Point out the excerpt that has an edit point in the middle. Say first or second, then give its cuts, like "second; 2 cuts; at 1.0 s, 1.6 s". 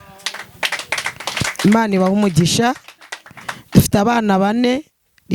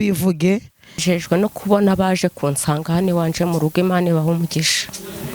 second; 1 cut; at 1.0 s